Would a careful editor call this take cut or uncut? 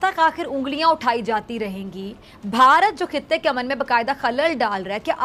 uncut